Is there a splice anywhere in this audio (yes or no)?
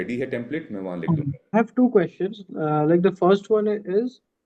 yes